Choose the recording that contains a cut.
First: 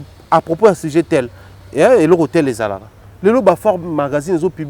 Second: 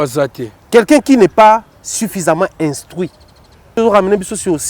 second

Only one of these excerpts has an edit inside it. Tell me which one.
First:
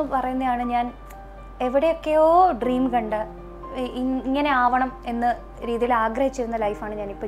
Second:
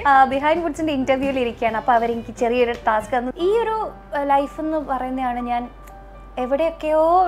second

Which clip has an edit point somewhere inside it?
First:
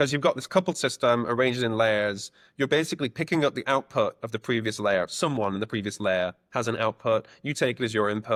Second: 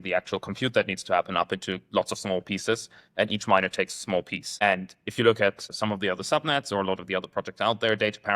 second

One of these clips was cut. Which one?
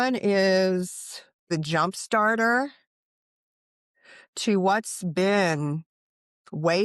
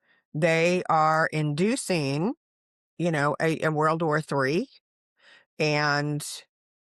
first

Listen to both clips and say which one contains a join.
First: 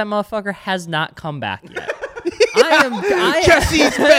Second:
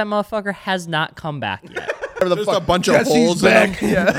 second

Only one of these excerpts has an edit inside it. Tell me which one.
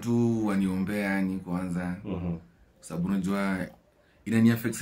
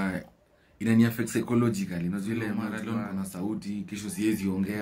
second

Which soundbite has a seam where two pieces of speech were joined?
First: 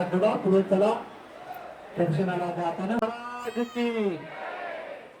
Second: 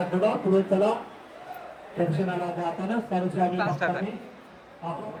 first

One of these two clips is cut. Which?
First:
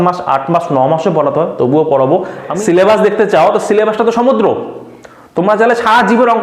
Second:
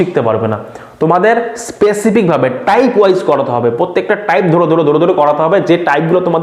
first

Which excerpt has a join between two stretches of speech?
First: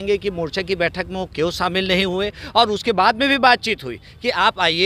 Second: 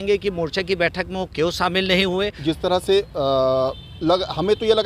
second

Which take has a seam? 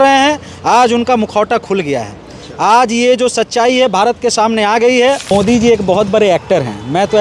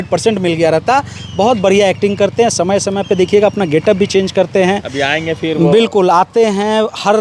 first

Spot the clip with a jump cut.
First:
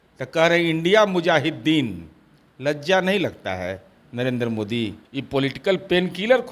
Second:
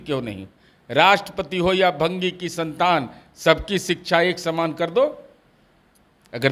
first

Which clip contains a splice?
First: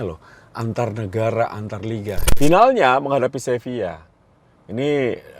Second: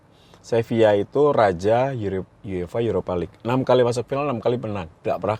first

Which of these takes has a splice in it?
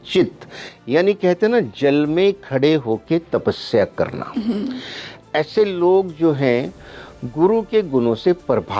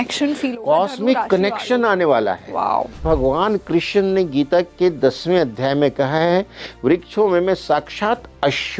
second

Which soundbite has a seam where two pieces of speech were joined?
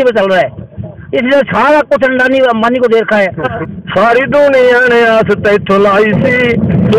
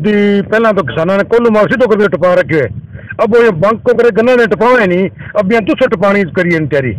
first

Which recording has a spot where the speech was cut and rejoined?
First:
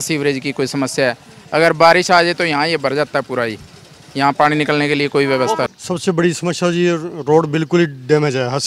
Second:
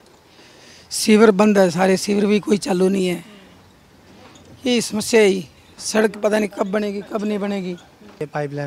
first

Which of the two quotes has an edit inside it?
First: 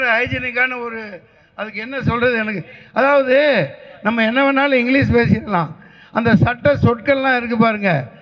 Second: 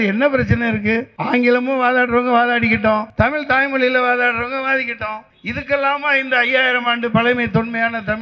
second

